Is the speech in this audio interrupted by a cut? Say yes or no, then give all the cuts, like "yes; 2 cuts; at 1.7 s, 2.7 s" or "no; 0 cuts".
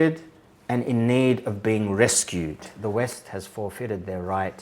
yes; 1 cut; at 2.8 s